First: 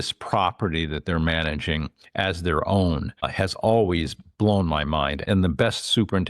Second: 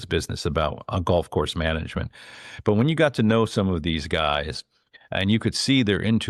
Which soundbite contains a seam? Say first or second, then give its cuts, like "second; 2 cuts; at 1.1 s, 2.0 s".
first; 2 cuts; at 3.3 s, 5.2 s